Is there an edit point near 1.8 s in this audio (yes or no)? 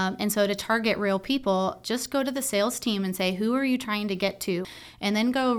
no